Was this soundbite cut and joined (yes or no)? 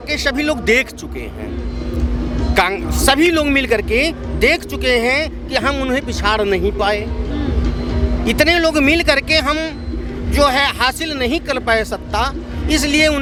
no